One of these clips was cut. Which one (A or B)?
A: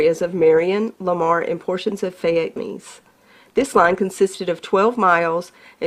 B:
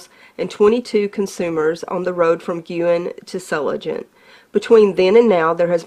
A